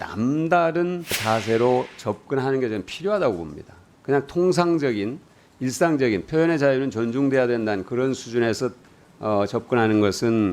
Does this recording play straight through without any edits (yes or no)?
no